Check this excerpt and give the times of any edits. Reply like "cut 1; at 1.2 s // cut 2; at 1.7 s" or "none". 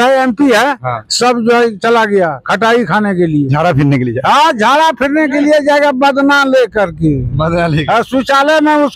none